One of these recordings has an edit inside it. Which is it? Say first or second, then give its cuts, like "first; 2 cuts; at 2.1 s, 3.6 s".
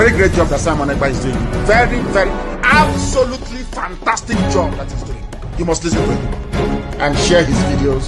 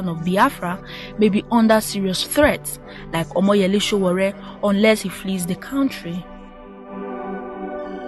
second; 1 cut; at 7.0 s